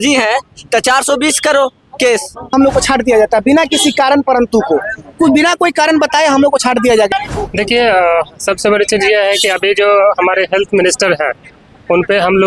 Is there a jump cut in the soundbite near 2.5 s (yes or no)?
yes